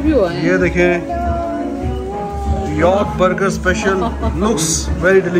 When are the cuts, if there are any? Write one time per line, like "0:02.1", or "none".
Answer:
none